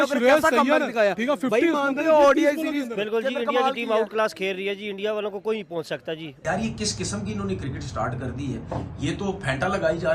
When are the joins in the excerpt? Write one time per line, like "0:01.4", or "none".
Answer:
0:06.4